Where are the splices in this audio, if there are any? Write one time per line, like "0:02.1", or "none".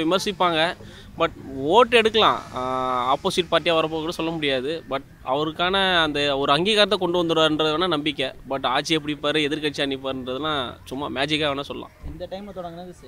none